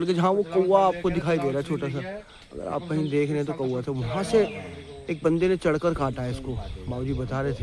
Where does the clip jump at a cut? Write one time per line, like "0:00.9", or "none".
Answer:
none